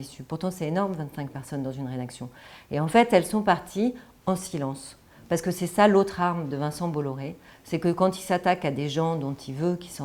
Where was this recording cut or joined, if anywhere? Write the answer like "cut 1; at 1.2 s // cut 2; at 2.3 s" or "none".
none